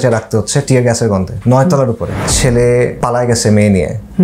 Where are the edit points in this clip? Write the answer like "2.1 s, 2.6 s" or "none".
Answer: 2.2 s, 3.0 s